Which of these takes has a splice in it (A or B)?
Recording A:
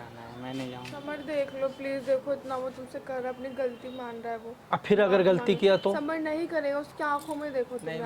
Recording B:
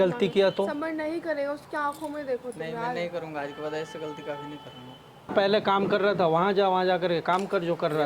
B